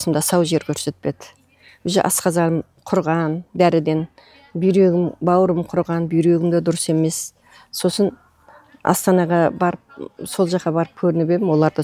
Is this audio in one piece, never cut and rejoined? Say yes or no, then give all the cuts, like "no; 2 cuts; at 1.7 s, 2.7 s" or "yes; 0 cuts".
yes; 0 cuts